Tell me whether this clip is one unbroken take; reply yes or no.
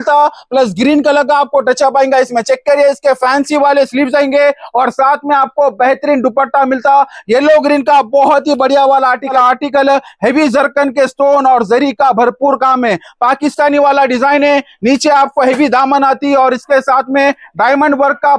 no